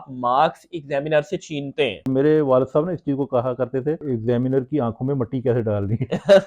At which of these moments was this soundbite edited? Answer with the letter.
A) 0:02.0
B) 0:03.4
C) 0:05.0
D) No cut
A